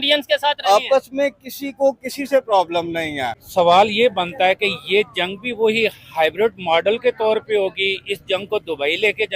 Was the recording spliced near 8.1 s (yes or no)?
no